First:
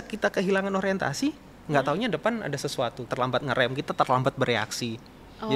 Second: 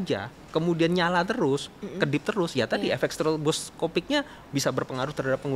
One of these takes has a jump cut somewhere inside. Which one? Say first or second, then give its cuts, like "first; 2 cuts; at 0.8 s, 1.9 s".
first; 1 cut; at 3.0 s